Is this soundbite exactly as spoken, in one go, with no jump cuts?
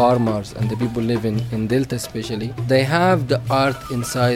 no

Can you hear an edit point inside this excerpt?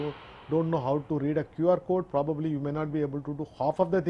no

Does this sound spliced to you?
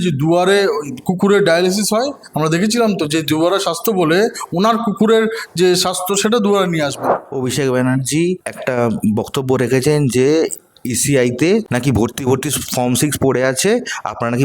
yes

